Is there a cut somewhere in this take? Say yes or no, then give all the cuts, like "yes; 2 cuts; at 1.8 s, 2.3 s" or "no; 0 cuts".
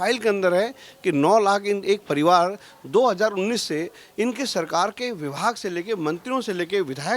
no; 0 cuts